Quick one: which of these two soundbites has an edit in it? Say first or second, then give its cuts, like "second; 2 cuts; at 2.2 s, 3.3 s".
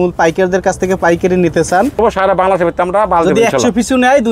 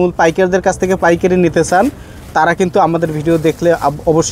first; 1 cut; at 1.9 s